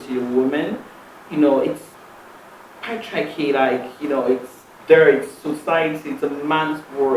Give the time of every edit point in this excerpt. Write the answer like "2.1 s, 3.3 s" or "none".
1.9 s